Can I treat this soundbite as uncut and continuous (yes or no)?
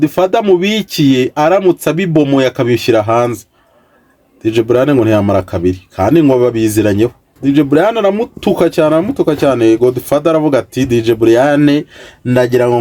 no